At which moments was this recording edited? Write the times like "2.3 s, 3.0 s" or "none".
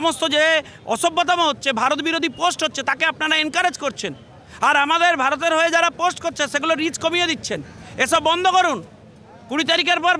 none